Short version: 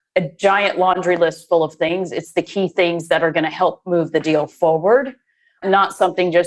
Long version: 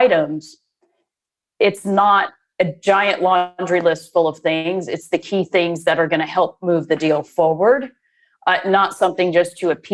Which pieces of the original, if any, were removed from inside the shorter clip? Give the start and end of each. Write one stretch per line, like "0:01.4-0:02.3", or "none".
0:03.4-0:03.6
0:04.5-0:04.6
0:08.4-0:08.6